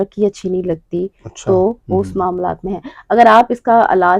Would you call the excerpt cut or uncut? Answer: uncut